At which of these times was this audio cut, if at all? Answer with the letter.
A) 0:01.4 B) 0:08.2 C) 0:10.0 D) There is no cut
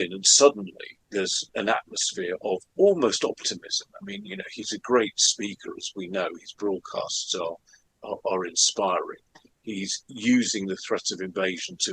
A